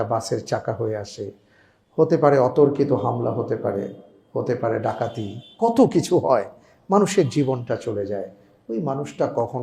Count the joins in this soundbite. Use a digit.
0